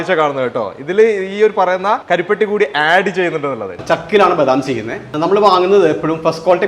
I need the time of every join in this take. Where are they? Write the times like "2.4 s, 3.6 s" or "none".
2.0 s, 3.8 s, 5.1 s